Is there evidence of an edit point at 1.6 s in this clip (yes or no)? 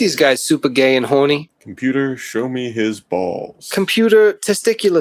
yes